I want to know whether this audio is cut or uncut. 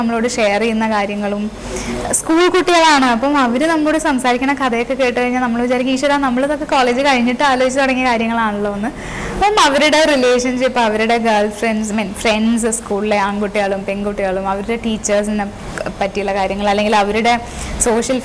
uncut